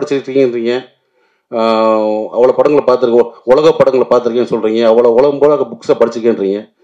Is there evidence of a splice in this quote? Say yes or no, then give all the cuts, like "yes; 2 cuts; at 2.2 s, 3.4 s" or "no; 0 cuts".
no; 0 cuts